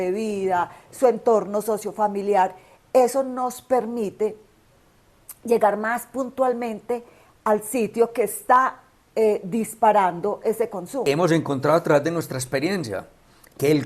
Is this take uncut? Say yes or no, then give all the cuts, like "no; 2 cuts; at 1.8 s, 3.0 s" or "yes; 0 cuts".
no; 1 cut; at 11.0 s